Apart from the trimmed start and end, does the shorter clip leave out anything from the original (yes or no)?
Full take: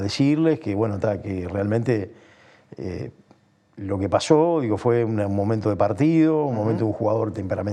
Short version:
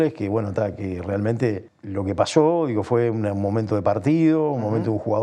yes